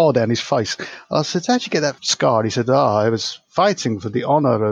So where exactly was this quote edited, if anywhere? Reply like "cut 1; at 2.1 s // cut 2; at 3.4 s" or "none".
cut 1; at 2.0 s